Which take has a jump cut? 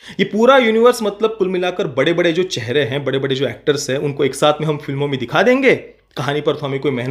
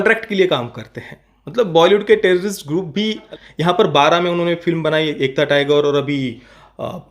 second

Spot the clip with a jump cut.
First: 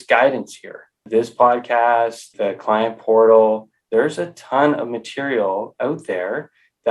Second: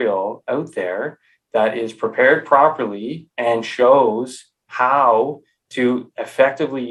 first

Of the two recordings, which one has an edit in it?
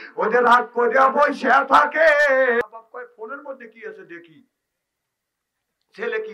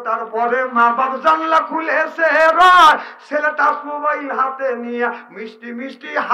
first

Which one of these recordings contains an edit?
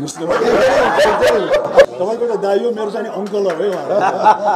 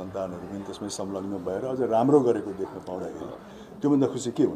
first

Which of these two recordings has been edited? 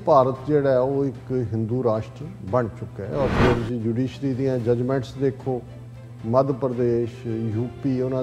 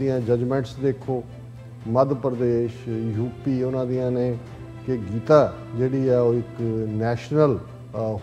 first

